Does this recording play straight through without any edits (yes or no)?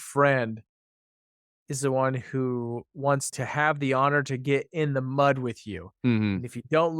no